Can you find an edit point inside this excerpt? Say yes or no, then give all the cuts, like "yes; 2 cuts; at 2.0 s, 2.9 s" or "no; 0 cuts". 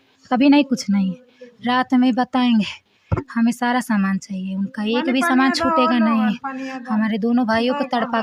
no; 0 cuts